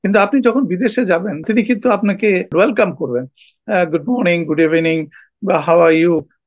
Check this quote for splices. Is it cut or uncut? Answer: cut